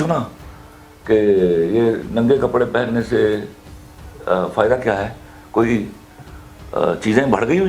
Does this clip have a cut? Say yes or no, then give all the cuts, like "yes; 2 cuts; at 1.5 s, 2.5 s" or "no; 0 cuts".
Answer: no; 0 cuts